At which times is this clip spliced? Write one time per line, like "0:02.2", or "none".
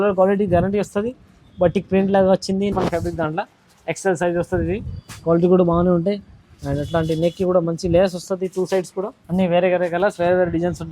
0:02.7
0:09.2